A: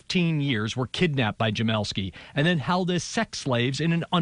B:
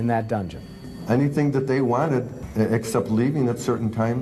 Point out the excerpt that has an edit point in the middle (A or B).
B